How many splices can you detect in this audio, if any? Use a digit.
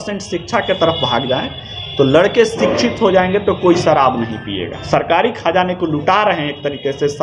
1